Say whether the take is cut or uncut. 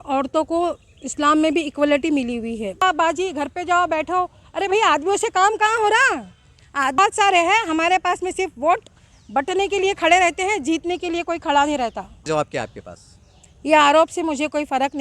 cut